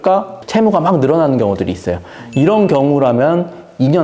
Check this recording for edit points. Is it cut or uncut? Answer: uncut